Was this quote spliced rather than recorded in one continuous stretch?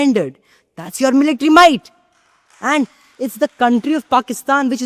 no; 0 cuts

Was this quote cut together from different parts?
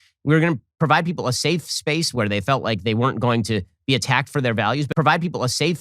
yes; 1 cut; at 4.9 s

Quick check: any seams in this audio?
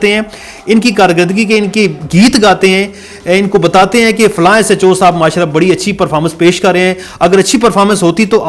no; 0 cuts

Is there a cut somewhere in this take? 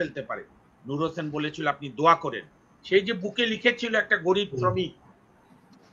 no; 0 cuts

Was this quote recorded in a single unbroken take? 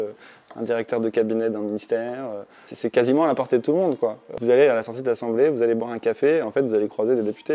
no; 2 cuts; at 2.6 s, 4.3 s

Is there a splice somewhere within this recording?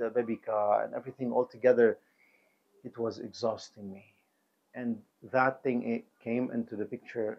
no; 0 cuts

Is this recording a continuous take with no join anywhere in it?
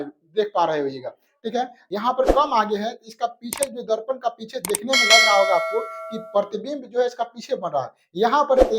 no; 1 cut; at 1.8 s

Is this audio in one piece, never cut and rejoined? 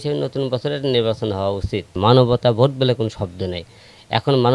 no; 1 cut; at 1.9 s

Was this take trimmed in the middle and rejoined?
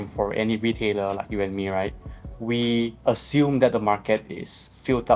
yes; 1 cut; at 3.0 s

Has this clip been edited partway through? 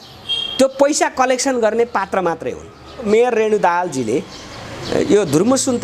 yes; 1 cut; at 3.0 s

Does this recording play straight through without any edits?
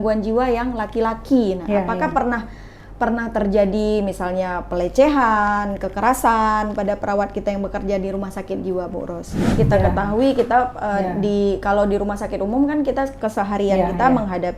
no; 1 cut; at 9.5 s

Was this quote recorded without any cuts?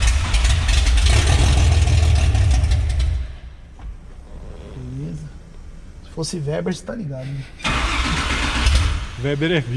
yes; 0 cuts

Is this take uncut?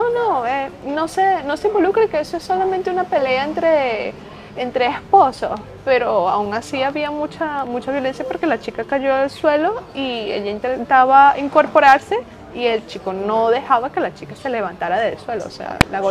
yes; 0 cuts

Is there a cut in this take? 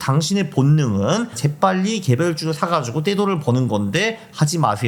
no; 0 cuts

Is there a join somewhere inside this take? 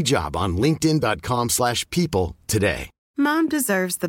yes; 1 cut; at 2.9 s

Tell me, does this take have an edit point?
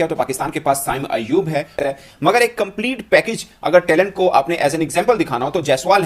yes; 1 cut; at 1.8 s

